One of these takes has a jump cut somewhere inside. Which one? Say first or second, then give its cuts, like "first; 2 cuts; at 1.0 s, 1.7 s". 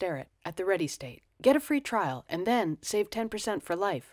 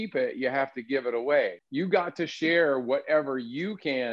second; 1 cut; at 1.6 s